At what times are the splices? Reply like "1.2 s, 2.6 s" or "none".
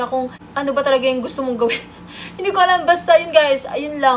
none

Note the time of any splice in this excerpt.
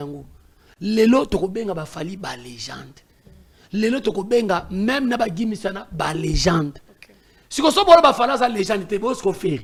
none

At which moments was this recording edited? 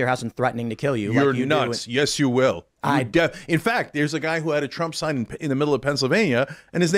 none

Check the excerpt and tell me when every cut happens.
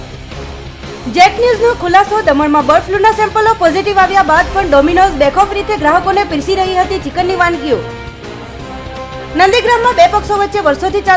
1.1 s

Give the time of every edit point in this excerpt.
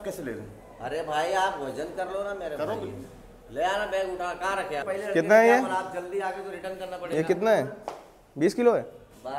4.8 s

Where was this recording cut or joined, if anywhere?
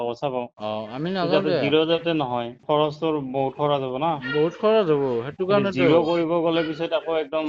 2.6 s

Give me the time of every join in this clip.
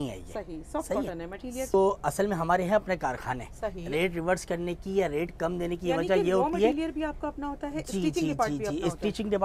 1.7 s

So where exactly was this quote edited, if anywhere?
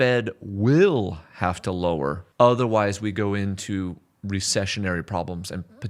2.2 s

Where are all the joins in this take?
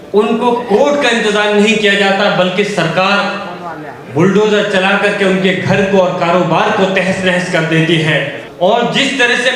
8.4 s

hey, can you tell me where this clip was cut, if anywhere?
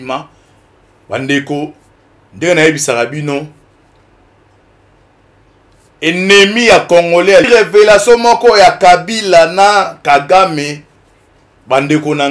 7.5 s

